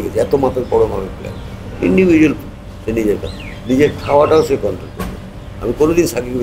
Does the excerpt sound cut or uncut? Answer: uncut